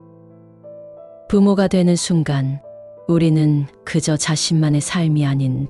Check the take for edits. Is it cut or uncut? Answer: cut